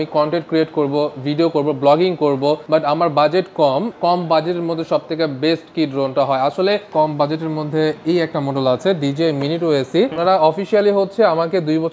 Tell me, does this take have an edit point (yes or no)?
yes